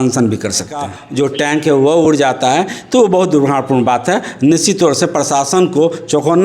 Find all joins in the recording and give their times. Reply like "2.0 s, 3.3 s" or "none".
1.0 s